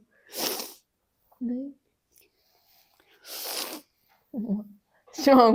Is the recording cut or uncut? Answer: uncut